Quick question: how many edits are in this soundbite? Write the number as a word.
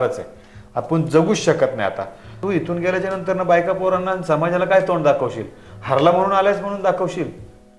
one